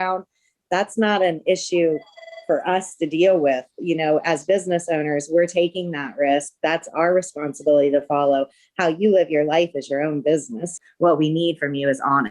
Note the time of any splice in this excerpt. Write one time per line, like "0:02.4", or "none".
0:10.7